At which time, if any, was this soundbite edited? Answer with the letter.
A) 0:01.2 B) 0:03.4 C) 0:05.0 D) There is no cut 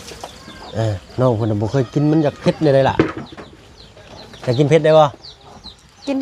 D